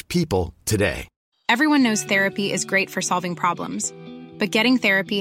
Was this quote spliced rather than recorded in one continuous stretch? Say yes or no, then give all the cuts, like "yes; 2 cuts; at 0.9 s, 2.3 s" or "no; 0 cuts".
yes; 1 cut; at 1.2 s